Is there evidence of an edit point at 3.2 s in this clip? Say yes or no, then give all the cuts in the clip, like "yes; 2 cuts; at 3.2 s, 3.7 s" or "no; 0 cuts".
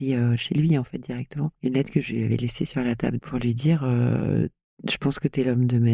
yes; 2 cuts; at 1.5 s, 3.2 s